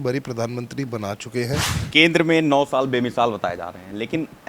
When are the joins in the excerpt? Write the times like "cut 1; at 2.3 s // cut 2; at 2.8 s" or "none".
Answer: cut 1; at 1.7 s